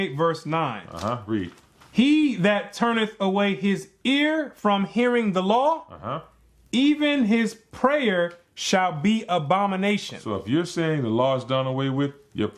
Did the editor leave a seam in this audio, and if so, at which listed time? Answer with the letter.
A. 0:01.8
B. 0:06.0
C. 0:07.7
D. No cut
D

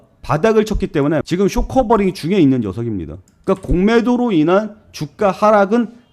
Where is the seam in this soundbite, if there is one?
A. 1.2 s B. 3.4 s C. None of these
A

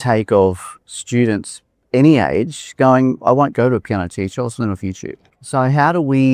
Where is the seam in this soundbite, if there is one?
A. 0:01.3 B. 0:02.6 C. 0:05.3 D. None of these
C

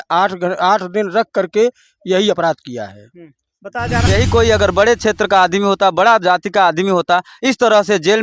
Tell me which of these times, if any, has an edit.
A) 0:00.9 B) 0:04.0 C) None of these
B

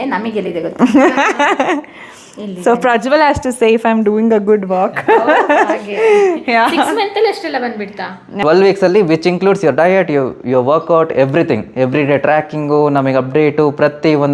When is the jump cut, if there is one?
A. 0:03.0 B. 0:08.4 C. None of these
B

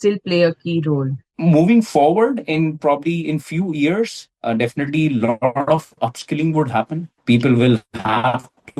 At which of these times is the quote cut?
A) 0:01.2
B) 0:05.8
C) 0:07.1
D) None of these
A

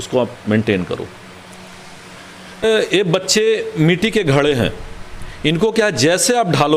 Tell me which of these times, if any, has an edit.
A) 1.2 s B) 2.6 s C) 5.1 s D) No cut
B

